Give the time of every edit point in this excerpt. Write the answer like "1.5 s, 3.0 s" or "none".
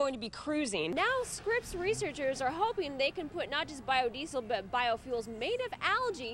0.9 s